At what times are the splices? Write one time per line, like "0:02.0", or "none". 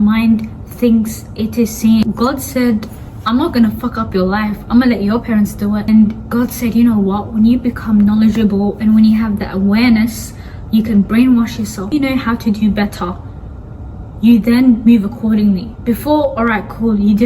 0:02.0
0:05.9
0:11.9